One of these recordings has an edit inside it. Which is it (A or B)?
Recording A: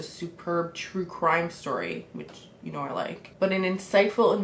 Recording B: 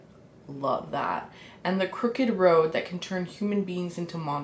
A